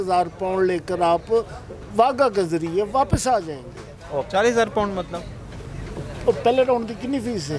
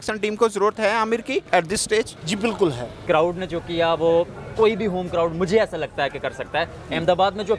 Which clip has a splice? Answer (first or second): second